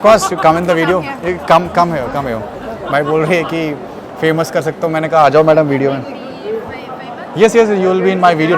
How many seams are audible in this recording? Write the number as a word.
zero